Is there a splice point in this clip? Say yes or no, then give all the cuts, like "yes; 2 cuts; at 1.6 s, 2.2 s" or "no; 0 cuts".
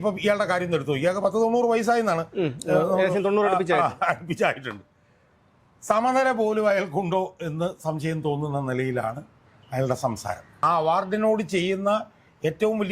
yes; 1 cut; at 10.6 s